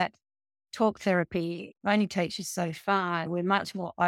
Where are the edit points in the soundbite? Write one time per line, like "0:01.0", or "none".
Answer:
0:01.8
0:03.3